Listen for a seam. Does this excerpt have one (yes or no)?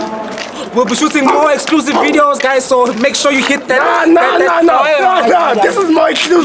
no